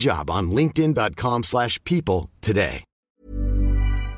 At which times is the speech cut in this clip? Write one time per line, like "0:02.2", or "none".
0:03.0